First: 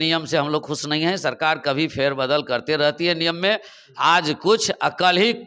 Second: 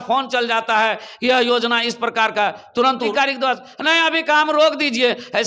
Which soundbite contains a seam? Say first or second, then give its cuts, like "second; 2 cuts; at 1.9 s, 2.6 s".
second; 1 cut; at 3.1 s